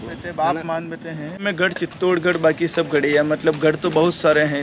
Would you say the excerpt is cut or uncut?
cut